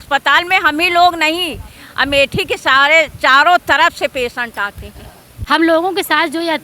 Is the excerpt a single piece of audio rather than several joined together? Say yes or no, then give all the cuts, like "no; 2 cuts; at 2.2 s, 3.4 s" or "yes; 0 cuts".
no; 1 cut; at 5.3 s